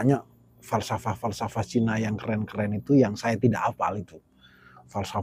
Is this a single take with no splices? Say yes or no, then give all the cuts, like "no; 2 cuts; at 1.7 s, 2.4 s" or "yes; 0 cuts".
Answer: yes; 0 cuts